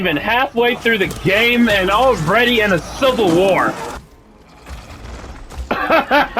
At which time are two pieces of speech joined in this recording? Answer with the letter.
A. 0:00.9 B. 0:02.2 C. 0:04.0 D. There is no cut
C